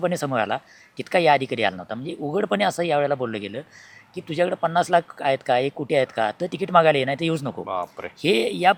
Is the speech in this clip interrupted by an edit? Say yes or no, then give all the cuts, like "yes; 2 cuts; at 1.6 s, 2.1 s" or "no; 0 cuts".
no; 0 cuts